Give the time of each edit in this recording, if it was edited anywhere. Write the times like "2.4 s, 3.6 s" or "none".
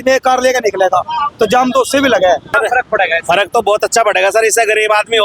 2.5 s